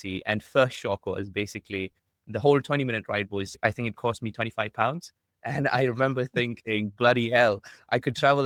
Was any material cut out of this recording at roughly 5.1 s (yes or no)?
no